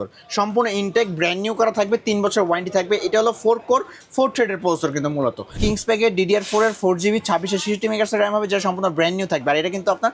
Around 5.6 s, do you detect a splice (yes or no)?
yes